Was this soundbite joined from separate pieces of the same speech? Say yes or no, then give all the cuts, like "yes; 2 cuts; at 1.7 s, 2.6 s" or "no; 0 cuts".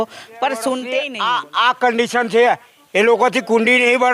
yes; 1 cut; at 0.9 s